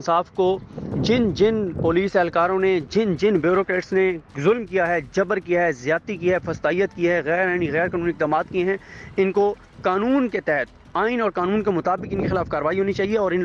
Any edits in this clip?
no; 0 cuts

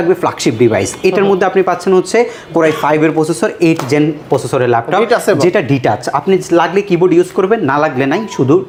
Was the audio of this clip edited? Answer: no; 0 cuts

